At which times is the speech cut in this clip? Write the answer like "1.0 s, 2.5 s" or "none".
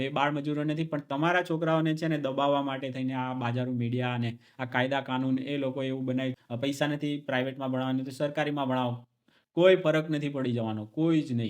6.4 s